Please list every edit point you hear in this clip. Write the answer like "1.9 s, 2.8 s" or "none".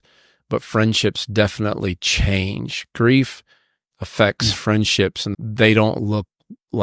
5.3 s